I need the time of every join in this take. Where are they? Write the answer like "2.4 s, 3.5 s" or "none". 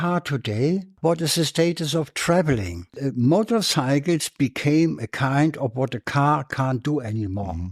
0.9 s, 3.0 s